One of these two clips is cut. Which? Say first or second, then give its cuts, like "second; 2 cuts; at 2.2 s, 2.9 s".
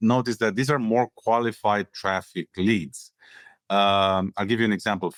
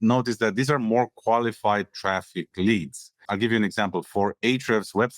second; 1 cut; at 3.3 s